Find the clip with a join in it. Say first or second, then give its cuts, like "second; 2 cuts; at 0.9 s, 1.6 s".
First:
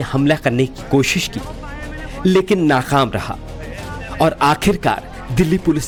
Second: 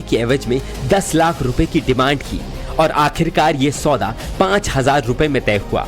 second; 1 cut; at 4.2 s